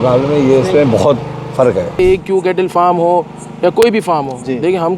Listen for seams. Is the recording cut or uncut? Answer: cut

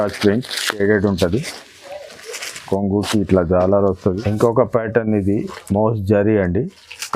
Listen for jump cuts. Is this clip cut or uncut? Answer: cut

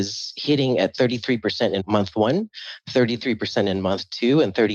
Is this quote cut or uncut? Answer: cut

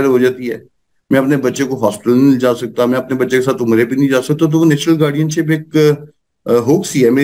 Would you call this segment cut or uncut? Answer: uncut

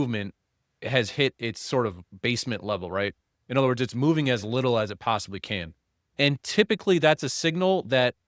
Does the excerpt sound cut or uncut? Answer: uncut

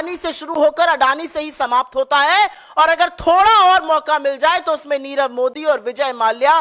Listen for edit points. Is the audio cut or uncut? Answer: uncut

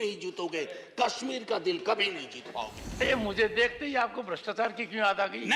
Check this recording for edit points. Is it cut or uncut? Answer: cut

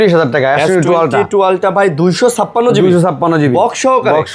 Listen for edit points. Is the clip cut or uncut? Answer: uncut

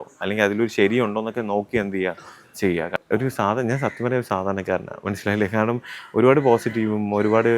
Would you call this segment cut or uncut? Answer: cut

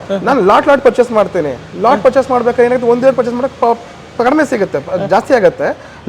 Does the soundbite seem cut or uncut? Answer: uncut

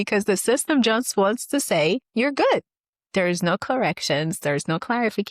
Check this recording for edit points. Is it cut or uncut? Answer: cut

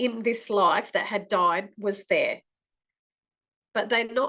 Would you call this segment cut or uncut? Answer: uncut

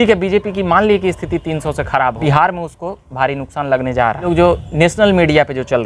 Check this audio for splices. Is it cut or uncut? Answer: cut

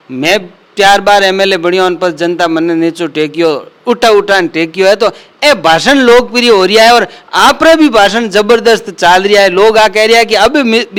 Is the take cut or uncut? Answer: uncut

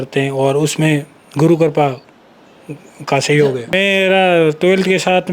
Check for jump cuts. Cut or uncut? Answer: cut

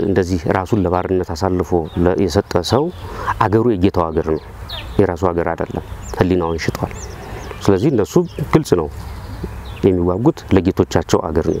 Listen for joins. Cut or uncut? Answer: uncut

